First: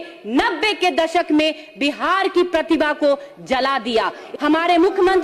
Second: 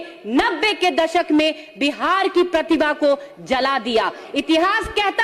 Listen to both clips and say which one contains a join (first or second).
first